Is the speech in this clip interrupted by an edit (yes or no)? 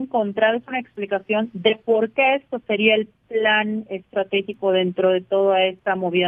no